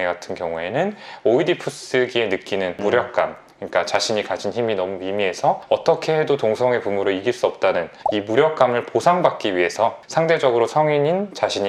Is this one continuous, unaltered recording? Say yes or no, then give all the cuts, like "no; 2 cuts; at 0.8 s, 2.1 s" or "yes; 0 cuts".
yes; 0 cuts